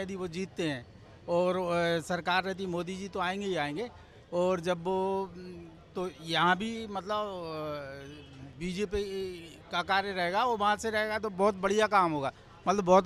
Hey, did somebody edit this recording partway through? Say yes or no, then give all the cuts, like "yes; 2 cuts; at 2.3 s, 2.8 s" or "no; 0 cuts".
no; 0 cuts